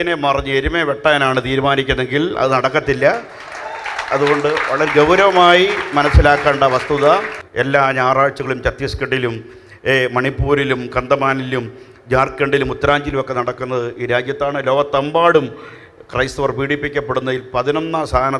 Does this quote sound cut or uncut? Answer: cut